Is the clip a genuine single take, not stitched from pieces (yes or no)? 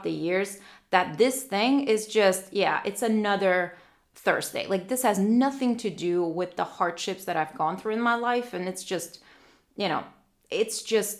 yes